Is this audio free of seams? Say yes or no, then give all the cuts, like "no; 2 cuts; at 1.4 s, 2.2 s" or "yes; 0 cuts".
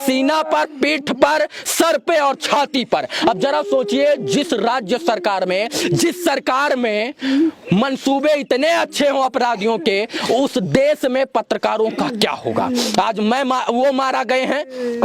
yes; 0 cuts